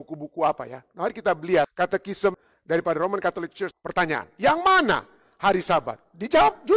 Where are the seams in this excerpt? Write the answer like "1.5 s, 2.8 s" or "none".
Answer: 2.1 s, 3.7 s